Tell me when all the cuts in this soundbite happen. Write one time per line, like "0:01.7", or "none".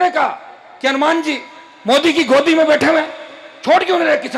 none